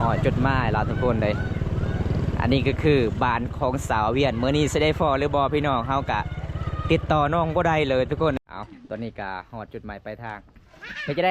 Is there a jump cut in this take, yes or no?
yes